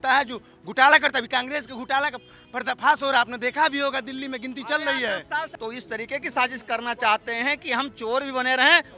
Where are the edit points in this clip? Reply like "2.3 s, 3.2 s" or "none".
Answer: 5.5 s